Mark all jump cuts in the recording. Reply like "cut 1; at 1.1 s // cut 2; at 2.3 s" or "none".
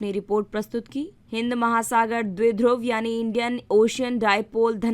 cut 1; at 1.2 s